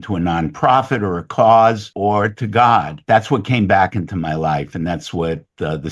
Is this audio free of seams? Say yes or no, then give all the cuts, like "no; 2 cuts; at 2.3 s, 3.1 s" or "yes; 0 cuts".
no; 2 cuts; at 1.9 s, 2.9 s